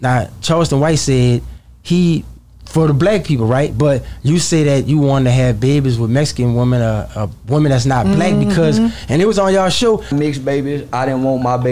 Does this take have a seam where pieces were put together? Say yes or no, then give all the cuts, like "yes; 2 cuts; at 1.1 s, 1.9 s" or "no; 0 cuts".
no; 0 cuts